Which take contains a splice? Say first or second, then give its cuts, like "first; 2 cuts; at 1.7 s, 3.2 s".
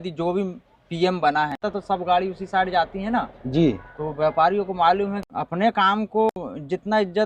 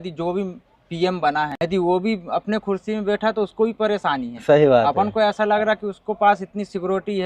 first; 3 cuts; at 1.6 s, 5.2 s, 6.3 s